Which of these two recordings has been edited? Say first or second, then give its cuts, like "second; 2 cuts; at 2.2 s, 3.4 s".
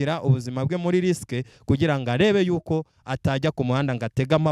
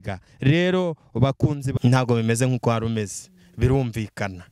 second; 1 cut; at 1.7 s